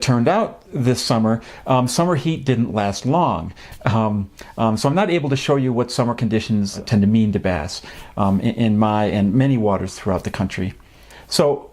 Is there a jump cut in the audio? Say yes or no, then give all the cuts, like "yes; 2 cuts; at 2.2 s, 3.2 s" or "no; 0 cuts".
yes; 1 cut; at 4.9 s